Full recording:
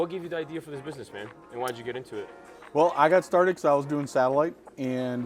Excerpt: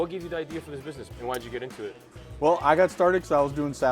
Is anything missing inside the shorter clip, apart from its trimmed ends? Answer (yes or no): yes